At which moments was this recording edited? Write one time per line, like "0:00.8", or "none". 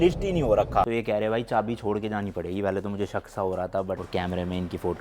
0:00.8
0:04.0